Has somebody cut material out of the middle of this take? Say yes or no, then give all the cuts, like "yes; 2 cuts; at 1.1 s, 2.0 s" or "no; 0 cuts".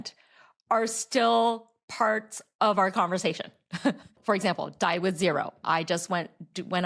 no; 0 cuts